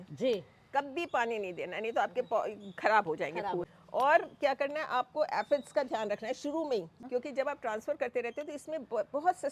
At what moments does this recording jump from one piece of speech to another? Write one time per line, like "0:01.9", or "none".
0:03.7
0:07.0